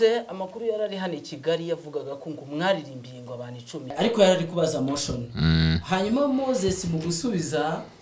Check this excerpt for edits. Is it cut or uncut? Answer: cut